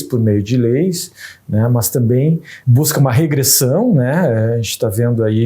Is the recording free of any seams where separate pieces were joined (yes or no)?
no